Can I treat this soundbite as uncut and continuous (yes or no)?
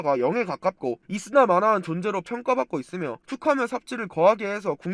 no